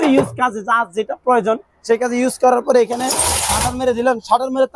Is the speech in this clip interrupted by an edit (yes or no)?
no